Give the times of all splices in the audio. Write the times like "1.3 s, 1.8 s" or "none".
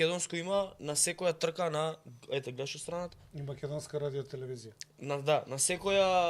none